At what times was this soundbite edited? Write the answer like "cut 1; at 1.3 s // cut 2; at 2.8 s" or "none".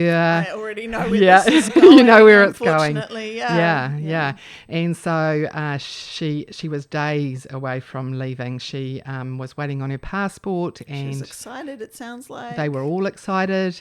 none